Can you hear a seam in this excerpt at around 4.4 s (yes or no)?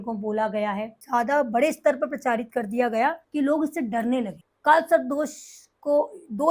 yes